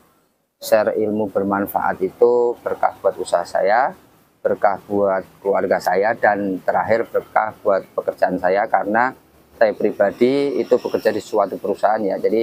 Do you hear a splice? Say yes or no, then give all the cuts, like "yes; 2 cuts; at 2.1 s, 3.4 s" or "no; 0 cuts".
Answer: no; 0 cuts